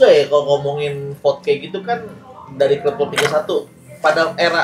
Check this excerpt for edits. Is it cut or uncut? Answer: uncut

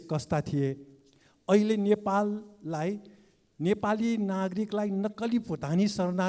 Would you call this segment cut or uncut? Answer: uncut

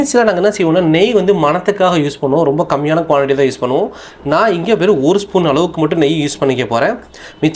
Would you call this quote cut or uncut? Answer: uncut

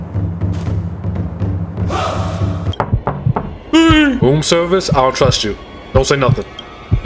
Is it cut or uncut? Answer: cut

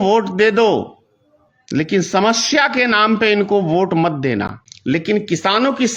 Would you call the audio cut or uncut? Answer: cut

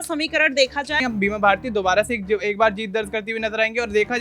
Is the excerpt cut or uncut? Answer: cut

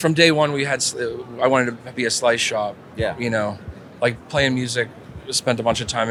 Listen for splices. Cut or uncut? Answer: uncut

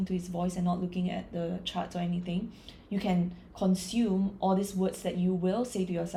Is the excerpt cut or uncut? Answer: uncut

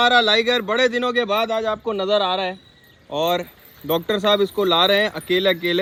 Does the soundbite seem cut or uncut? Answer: uncut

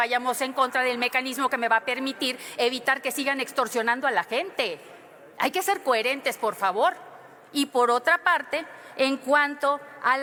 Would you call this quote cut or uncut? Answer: uncut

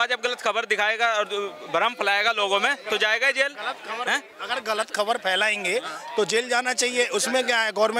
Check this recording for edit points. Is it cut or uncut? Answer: uncut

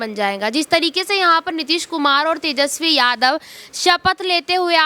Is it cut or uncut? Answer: uncut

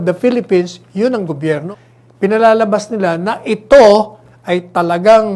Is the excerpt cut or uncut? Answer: cut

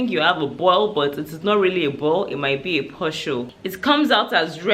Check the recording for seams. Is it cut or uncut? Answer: cut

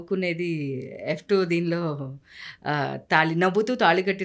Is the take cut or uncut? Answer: uncut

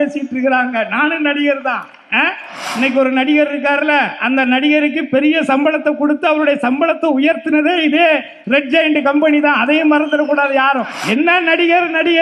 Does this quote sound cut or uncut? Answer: cut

